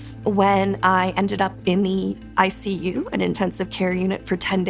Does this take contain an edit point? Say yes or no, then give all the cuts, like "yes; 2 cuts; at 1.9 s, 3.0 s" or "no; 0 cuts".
no; 0 cuts